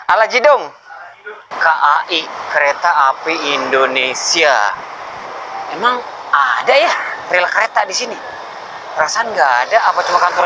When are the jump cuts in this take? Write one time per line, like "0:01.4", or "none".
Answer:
0:01.5